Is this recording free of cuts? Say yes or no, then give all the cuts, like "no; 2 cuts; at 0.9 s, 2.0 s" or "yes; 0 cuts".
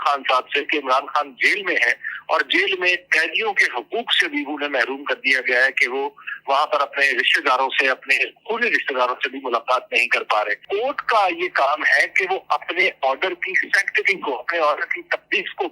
no; 1 cut; at 10.6 s